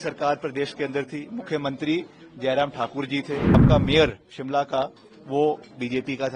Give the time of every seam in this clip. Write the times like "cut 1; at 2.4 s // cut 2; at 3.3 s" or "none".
cut 1; at 3.6 s